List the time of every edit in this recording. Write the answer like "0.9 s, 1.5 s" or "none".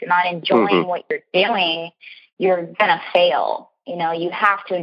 none